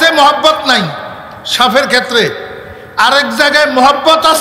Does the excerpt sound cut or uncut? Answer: uncut